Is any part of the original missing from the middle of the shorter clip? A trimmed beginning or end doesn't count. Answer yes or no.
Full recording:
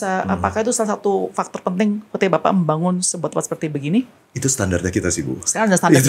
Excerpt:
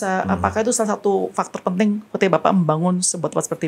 no